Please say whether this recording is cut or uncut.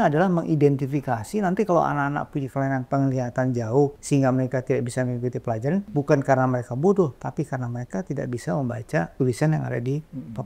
cut